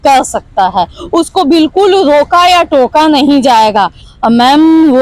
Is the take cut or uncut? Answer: cut